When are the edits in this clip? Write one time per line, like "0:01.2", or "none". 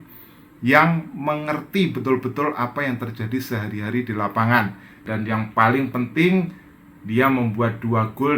0:05.0

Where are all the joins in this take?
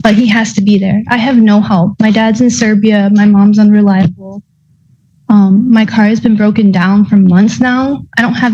none

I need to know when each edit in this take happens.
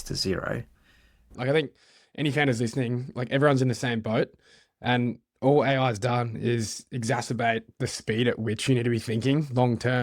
0:01.3

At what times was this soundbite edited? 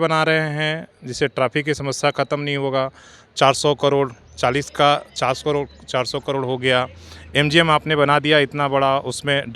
none

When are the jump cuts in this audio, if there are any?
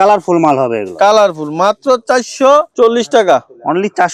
none

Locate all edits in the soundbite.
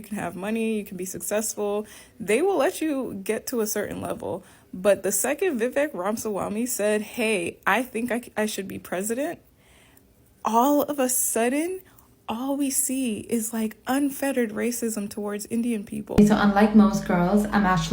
0:16.1

